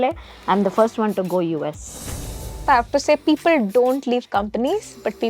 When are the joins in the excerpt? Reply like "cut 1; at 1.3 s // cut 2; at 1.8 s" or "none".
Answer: cut 1; at 2.4 s